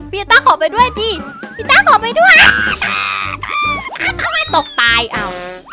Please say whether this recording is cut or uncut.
uncut